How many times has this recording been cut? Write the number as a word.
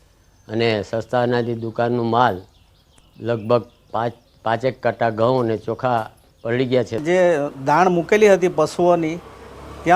one